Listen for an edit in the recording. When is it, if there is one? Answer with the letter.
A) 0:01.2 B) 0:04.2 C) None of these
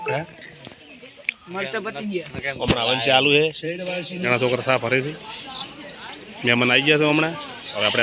B